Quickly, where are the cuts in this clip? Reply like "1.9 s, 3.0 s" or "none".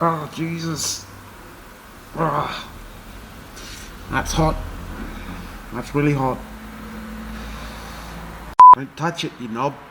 8.7 s